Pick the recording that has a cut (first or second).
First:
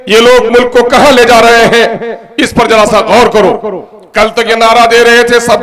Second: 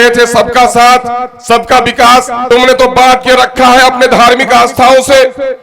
second